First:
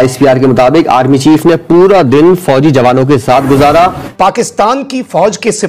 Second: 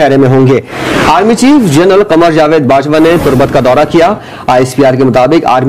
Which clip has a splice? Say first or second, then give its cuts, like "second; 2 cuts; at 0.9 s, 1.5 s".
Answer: first; 1 cut; at 4.0 s